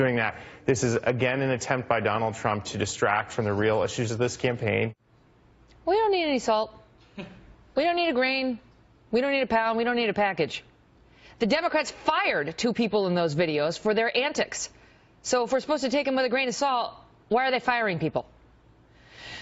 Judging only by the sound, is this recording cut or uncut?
uncut